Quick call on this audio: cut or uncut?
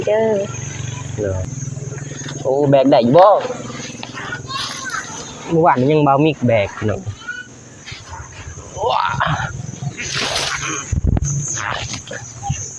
cut